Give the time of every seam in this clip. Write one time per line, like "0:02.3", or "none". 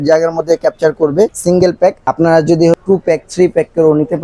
0:01.5
0:02.8